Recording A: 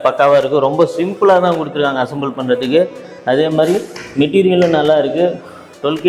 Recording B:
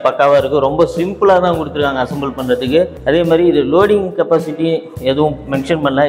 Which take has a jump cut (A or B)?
B